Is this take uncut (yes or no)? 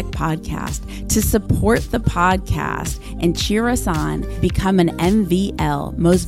yes